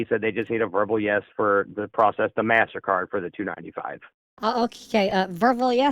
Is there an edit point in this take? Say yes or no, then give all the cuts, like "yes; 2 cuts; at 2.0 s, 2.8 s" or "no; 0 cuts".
no; 0 cuts